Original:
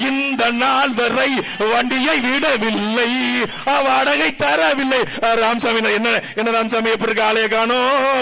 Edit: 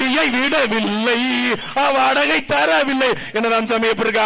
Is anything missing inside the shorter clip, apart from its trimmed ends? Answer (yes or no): yes